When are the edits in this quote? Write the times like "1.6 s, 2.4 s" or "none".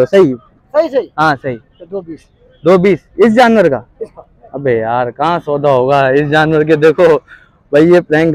none